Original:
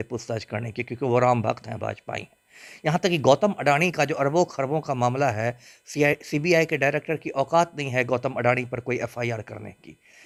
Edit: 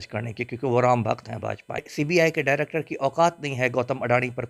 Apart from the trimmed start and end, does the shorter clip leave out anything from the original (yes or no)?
yes